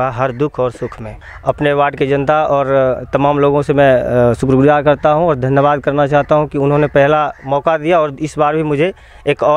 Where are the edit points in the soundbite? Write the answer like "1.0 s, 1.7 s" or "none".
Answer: 1.1 s